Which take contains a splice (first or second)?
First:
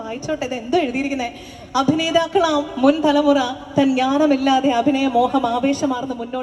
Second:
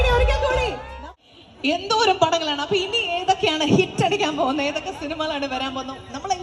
second